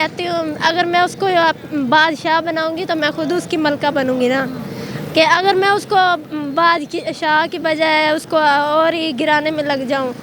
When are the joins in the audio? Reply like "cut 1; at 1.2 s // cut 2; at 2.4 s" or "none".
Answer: none